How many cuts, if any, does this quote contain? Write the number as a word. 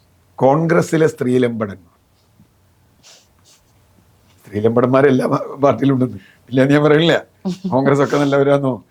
zero